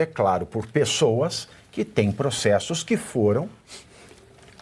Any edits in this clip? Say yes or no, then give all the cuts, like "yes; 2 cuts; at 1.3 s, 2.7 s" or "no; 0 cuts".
no; 0 cuts